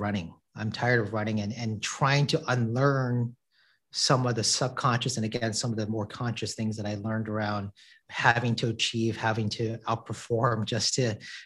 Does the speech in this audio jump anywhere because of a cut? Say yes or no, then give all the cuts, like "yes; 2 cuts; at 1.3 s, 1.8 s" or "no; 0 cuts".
no; 0 cuts